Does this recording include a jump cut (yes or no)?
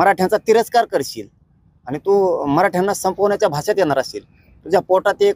no